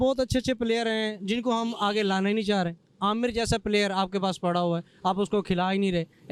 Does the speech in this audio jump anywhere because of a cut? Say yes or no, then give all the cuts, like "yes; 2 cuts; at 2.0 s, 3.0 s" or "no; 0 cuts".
no; 0 cuts